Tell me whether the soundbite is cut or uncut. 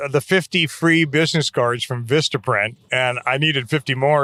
uncut